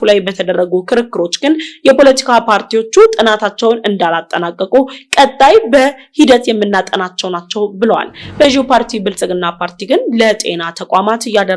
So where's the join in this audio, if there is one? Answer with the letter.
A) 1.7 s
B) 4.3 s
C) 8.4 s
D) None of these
C